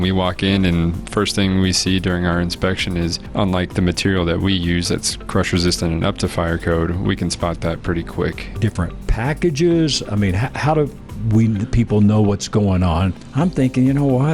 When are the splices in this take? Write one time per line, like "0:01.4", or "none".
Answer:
0:03.2
0:08.5
0:13.2